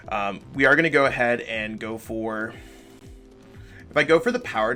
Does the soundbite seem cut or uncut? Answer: uncut